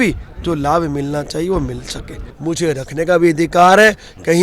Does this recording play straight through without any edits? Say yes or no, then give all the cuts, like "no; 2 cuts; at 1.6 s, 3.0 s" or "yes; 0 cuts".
no; 1 cut; at 2.2 s